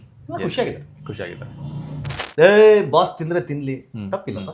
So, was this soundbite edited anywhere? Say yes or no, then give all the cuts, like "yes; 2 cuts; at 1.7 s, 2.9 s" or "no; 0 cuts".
yes; 1 cut; at 2.1 s